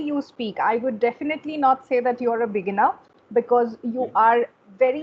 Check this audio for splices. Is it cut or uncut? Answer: uncut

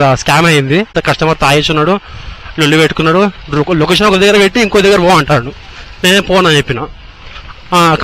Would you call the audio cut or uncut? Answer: cut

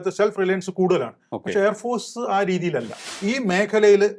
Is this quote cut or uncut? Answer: cut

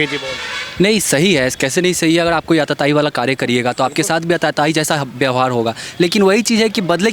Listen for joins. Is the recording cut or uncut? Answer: uncut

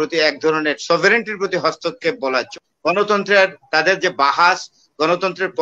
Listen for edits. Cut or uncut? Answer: cut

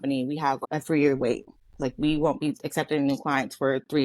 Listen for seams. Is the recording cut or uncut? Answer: uncut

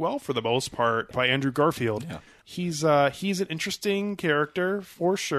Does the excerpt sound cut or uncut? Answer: cut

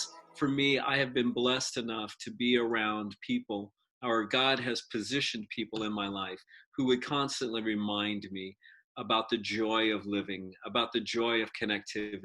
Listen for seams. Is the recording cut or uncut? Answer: uncut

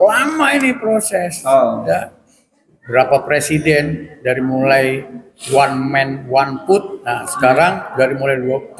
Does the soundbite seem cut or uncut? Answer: uncut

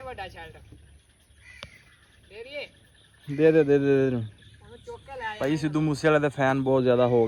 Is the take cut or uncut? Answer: uncut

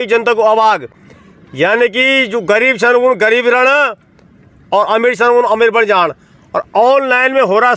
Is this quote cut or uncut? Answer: uncut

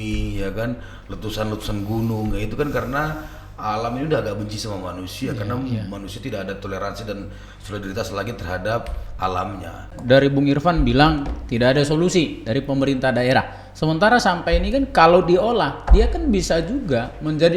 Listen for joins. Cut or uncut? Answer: cut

